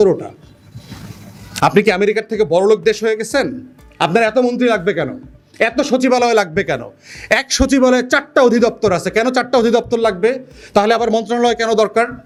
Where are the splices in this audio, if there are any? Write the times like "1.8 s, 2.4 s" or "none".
none